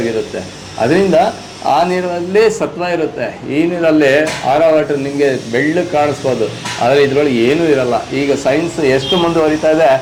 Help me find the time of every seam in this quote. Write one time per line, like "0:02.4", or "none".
none